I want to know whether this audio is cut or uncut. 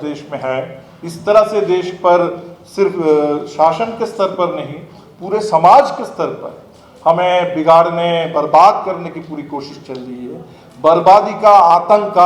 uncut